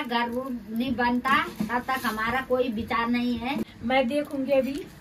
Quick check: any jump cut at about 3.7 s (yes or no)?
yes